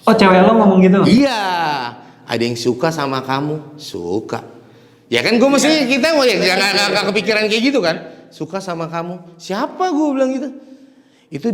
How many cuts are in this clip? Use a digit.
0